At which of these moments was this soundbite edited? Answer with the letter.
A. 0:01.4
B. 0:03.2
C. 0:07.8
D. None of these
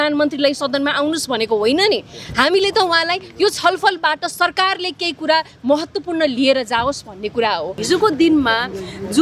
C